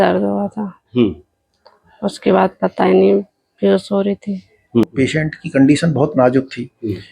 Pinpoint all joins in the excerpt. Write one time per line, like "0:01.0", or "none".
0:04.8